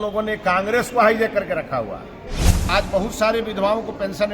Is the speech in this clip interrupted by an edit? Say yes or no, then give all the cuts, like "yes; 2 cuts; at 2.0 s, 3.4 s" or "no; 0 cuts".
yes; 1 cut; at 2.7 s